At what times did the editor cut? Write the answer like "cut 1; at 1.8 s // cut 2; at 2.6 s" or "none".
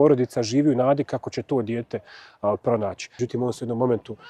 cut 1; at 3.1 s